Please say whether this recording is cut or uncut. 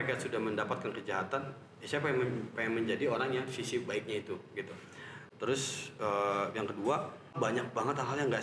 cut